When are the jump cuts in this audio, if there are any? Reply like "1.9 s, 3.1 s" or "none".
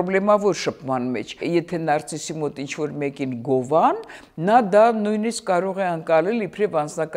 1.4 s